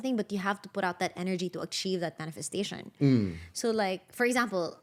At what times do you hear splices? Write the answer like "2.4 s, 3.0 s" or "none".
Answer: none

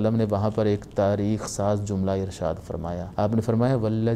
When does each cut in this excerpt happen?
3.0 s

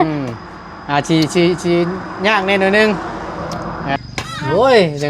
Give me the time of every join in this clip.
4.0 s

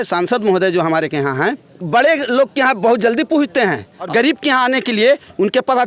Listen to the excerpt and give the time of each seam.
1.7 s, 4.0 s

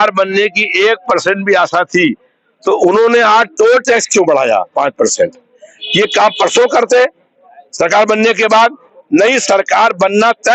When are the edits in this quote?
none

